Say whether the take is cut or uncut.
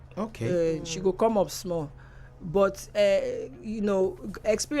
uncut